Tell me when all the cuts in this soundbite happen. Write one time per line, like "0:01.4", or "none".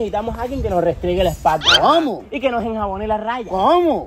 none